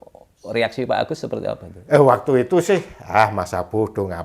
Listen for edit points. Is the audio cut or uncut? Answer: cut